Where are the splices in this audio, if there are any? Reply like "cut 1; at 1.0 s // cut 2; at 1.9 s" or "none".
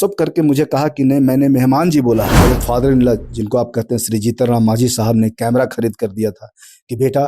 cut 1; at 2.3 s

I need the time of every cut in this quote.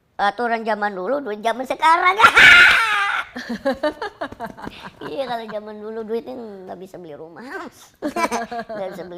none

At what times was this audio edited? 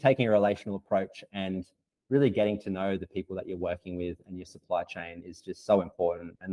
none

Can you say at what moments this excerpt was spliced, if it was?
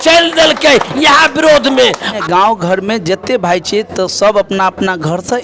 cut 1; at 2.2 s

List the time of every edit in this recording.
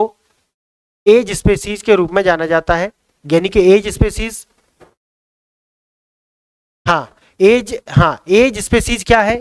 none

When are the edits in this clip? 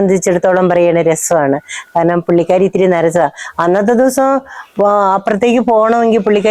none

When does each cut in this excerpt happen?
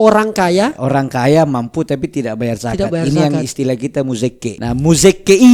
cut 1; at 0.8 s // cut 2; at 4.6 s

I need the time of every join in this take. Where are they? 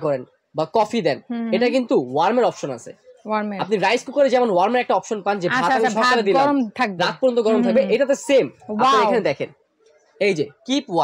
none

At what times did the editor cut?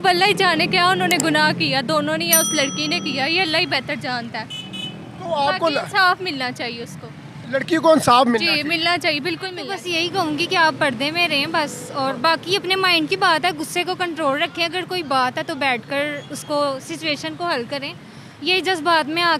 cut 1; at 9.7 s

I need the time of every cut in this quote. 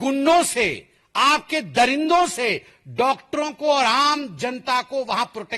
none

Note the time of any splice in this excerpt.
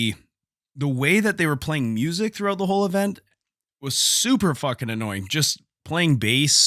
none

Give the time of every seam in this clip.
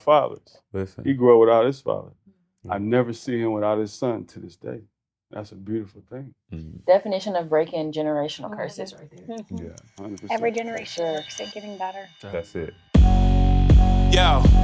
cut 1; at 12.8 s

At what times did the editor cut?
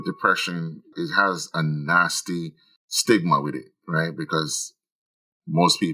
cut 1; at 0.9 s

